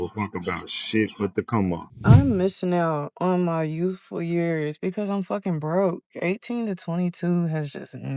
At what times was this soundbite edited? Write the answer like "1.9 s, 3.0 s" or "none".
1.9 s